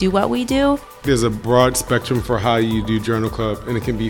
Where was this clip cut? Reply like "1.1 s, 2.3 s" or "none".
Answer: 1.0 s